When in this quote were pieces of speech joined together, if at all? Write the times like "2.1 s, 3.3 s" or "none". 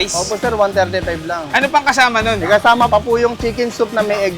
2.9 s